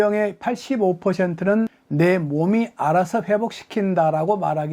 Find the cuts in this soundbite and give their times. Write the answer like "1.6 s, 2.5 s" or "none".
1.8 s